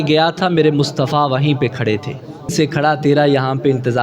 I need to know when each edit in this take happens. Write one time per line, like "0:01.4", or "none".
0:02.5